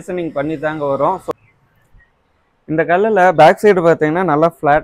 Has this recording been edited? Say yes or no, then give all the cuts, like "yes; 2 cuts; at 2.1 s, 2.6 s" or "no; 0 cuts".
yes; 1 cut; at 1.3 s